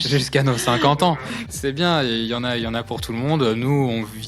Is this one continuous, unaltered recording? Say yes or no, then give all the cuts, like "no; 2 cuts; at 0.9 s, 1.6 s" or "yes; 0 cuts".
no; 1 cut; at 1.3 s